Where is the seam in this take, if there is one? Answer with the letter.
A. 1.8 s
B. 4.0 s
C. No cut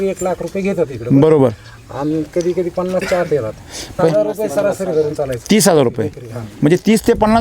B